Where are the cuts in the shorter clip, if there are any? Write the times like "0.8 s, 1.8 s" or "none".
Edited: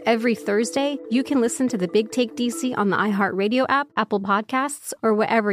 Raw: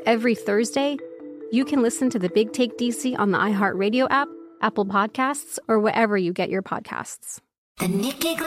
1.0 s, 3.9 s